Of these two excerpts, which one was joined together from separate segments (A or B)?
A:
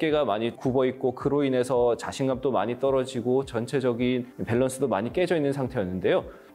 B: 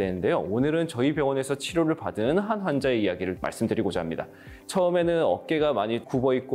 B